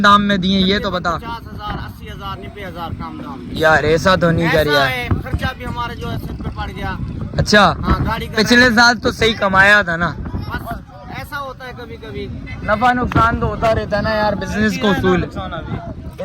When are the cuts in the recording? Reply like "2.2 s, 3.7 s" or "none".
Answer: none